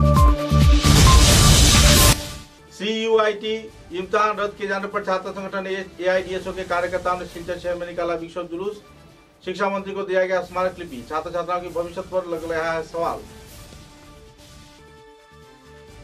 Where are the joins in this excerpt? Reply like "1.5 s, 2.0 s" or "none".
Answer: 2.1 s